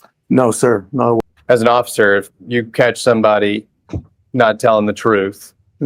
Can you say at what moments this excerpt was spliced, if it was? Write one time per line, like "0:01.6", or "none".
0:01.2